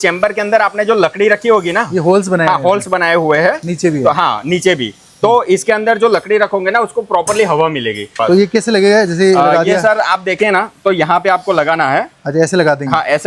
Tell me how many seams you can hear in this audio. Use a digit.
1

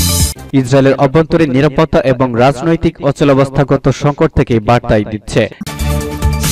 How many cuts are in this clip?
1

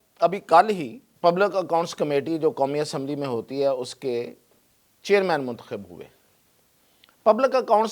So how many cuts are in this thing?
1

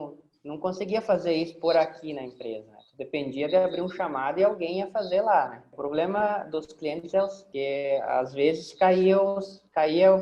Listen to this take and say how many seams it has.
2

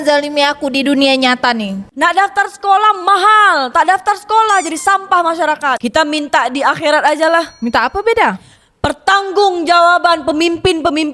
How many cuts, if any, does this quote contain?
2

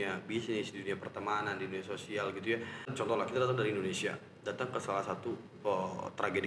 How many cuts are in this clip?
1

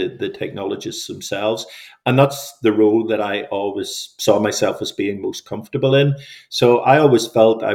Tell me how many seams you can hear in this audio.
0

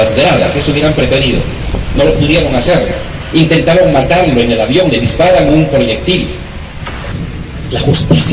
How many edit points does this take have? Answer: 1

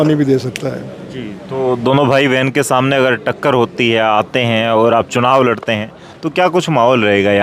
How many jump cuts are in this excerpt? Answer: 0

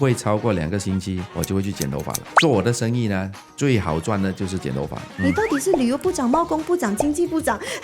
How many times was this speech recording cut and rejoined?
2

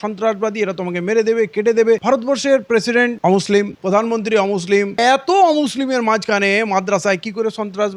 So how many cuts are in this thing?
2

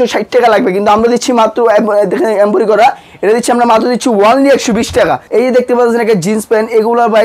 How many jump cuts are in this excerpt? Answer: 1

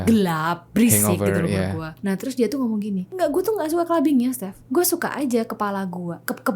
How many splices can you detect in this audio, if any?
2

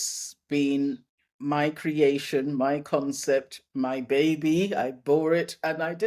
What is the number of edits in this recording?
0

